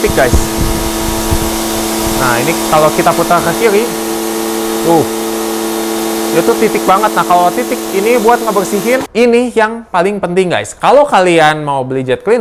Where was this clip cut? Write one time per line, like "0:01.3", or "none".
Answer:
0:09.1